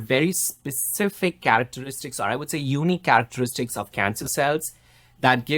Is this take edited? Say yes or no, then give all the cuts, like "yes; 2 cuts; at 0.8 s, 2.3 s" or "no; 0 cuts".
no; 0 cuts